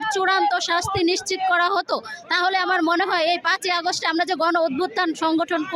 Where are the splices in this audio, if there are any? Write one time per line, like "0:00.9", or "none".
none